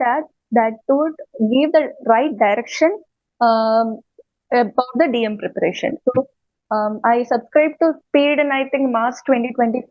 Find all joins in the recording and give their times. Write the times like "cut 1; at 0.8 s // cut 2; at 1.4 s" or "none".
none